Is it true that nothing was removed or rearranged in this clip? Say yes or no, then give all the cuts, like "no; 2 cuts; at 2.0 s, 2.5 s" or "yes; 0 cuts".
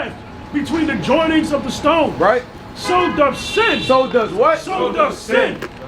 no; 1 cut; at 1.6 s